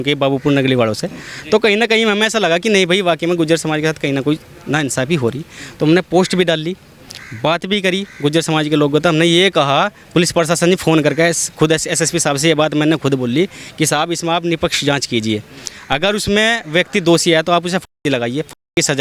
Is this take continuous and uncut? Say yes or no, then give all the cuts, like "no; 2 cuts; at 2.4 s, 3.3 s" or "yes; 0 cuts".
yes; 0 cuts